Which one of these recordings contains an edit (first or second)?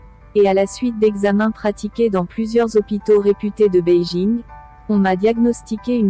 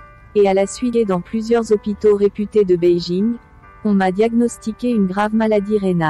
second